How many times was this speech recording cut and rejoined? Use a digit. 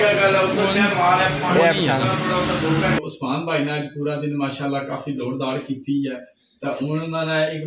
1